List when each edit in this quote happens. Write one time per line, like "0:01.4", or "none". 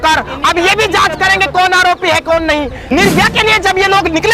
0:02.8